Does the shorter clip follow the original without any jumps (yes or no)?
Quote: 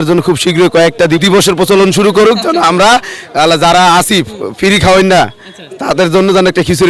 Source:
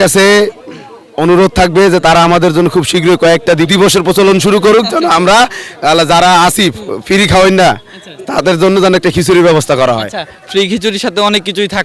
yes